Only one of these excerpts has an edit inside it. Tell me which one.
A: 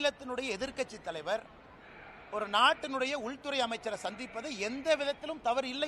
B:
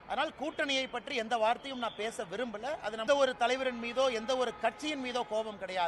B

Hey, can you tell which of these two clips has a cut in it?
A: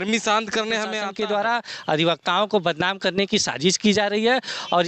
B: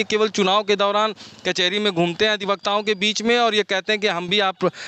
A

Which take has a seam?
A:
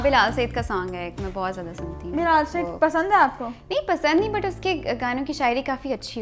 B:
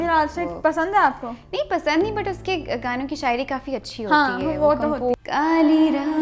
B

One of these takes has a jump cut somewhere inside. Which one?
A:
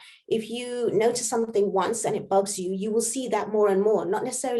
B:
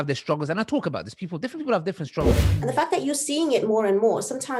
B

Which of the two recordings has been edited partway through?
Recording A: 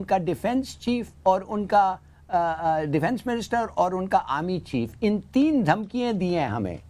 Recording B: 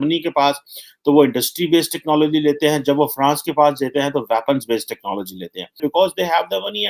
B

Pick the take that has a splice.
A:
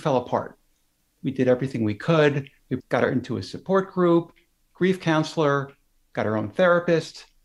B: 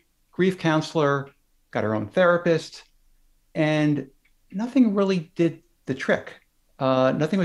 A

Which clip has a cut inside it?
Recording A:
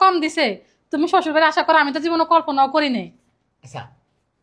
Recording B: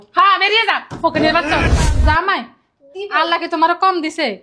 B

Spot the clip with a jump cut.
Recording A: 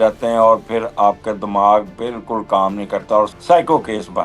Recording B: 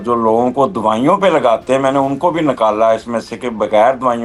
A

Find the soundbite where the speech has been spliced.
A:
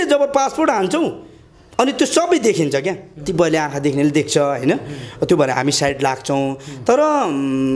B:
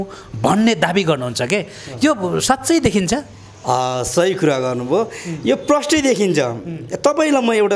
A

